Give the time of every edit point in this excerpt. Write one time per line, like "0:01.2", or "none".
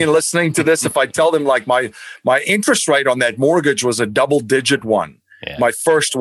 none